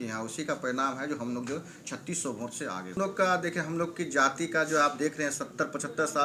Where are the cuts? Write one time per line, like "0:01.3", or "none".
0:03.0